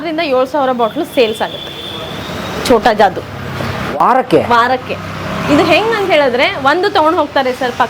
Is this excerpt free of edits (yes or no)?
yes